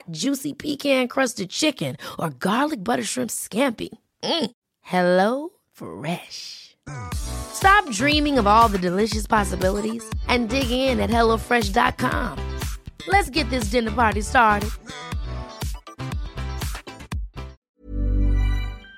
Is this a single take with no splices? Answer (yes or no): no